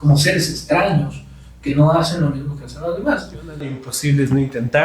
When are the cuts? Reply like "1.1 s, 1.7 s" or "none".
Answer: 3.9 s